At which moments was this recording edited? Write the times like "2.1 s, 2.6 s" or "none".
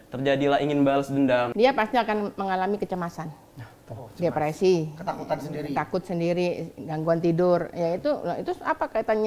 1.5 s